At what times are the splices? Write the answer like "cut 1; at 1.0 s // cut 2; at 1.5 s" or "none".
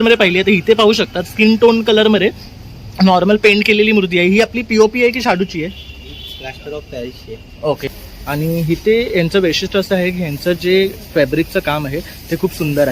cut 1; at 7.9 s